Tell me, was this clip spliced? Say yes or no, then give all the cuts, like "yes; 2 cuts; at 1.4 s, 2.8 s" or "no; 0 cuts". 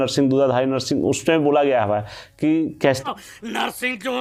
no; 0 cuts